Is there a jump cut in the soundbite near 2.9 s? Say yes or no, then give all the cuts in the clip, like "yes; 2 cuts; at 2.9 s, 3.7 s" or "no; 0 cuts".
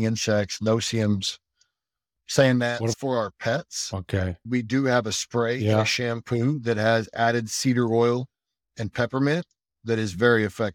yes; 1 cut; at 2.9 s